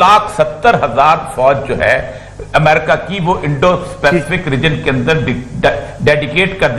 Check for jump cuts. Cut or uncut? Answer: uncut